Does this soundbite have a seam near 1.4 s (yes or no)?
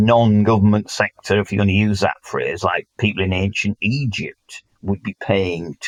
no